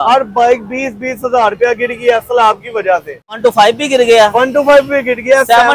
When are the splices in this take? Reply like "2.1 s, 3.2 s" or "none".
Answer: 3.4 s